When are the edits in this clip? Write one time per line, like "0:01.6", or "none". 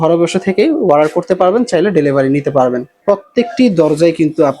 0:02.9